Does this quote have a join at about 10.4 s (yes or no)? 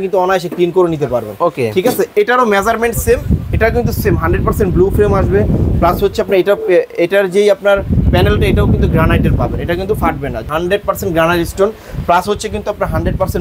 yes